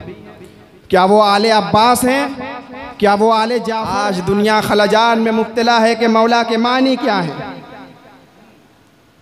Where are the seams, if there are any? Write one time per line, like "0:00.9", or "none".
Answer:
0:03.8